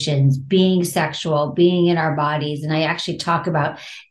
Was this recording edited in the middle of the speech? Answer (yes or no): no